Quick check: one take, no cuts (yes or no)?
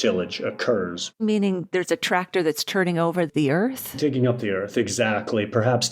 no